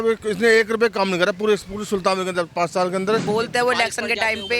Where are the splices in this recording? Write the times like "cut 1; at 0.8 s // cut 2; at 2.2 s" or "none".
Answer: cut 1; at 3.2 s